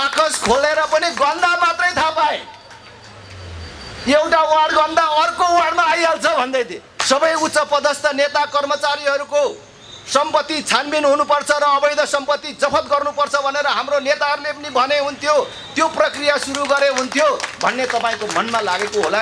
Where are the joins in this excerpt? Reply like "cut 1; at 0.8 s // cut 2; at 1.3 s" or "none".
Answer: cut 1; at 6.9 s